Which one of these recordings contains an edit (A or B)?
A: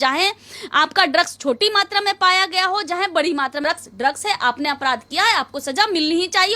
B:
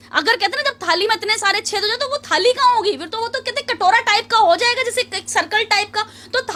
A